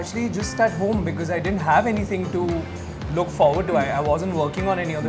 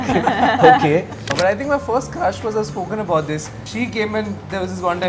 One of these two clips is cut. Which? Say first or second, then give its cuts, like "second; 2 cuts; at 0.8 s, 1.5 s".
second; 2 cuts; at 1.3 s, 3.6 s